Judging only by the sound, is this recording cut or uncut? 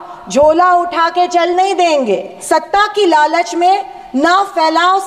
cut